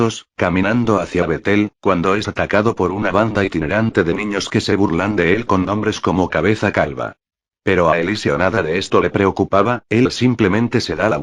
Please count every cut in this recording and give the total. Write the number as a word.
zero